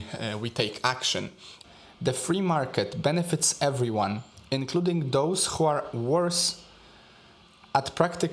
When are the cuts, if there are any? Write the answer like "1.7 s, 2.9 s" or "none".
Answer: 1.5 s